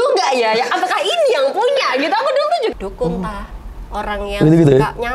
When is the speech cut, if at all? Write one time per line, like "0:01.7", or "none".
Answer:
0:02.7